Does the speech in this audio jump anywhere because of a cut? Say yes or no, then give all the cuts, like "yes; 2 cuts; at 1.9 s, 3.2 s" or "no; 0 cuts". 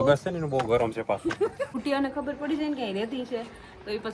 yes; 1 cut; at 1.7 s